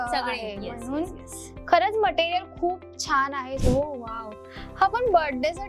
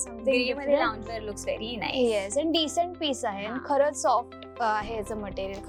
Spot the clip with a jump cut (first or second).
first